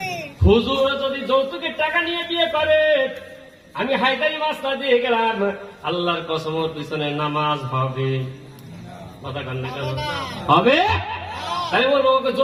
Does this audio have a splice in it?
no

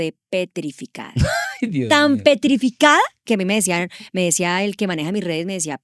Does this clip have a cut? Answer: no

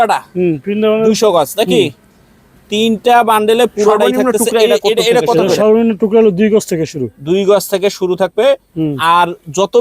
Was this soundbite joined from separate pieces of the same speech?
yes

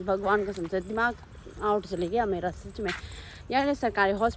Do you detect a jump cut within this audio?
no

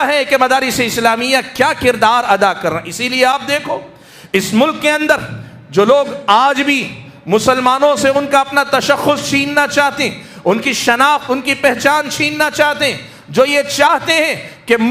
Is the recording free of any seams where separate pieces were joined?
yes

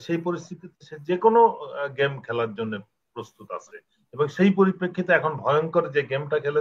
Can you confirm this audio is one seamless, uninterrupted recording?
yes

